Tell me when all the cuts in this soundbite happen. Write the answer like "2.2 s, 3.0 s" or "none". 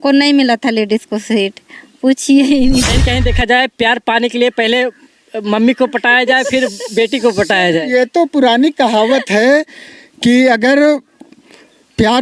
2.9 s